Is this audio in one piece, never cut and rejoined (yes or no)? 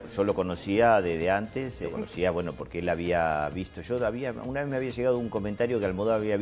no